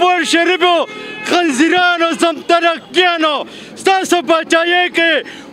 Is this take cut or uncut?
uncut